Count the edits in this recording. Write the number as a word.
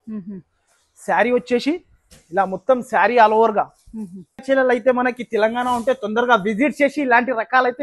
one